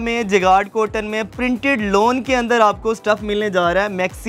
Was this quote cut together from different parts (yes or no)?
no